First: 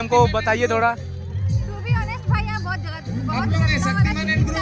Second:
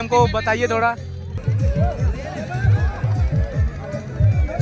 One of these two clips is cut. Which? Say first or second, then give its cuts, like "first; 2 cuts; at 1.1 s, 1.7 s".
second; 1 cut; at 1.3 s